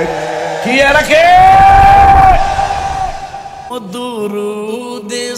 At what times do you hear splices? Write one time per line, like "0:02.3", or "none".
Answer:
0:03.7